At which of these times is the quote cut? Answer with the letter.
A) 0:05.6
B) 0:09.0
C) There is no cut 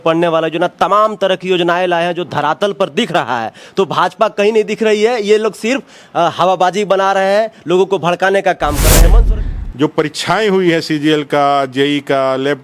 B